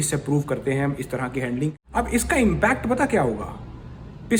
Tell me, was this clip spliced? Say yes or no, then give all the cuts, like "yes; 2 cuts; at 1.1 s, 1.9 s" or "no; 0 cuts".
yes; 1 cut; at 1.8 s